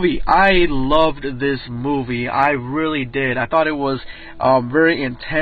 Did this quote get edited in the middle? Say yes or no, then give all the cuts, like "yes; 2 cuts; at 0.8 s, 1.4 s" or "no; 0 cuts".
no; 0 cuts